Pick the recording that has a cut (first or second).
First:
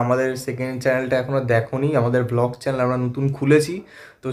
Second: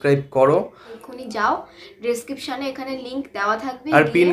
second